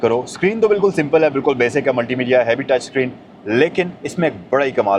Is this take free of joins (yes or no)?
yes